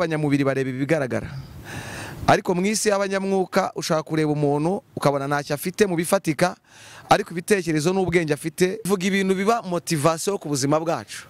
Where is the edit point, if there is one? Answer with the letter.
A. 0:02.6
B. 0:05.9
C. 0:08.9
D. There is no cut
C